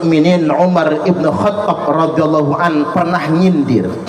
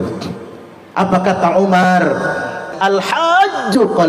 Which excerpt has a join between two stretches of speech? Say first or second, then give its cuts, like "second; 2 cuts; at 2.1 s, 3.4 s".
second; 1 cut; at 2.7 s